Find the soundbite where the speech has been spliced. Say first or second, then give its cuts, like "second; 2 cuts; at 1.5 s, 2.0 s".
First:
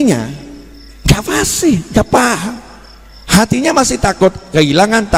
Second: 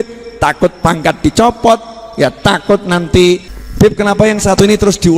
second; 1 cut; at 3.6 s